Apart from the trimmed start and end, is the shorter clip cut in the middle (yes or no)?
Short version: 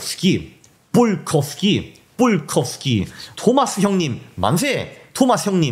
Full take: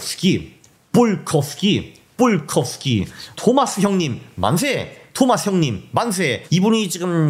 no